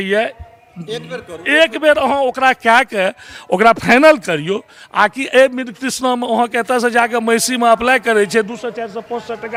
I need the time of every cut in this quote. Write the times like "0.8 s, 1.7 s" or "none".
none